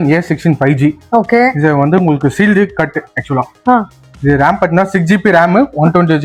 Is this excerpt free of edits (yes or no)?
yes